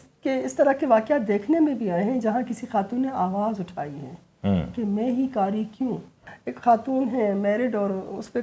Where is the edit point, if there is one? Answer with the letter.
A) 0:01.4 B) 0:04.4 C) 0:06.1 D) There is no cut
C